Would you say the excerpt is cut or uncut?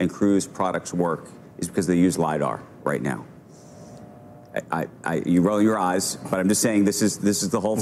uncut